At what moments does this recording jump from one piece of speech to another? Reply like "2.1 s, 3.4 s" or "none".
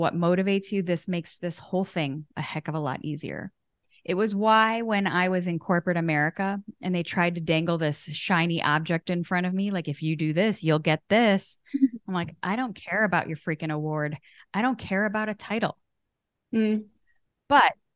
none